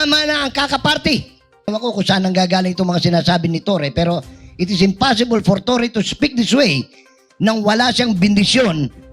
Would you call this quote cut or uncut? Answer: cut